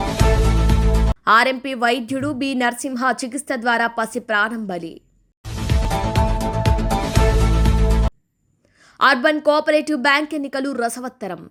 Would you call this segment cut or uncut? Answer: uncut